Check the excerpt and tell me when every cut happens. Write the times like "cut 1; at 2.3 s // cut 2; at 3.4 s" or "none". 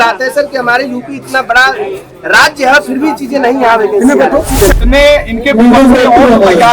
cut 1; at 4.8 s